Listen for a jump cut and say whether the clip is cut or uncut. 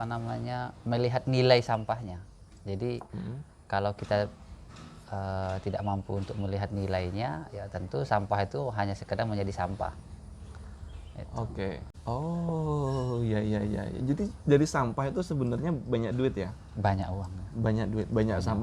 cut